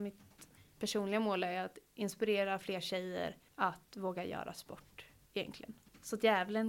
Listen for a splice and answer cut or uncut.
cut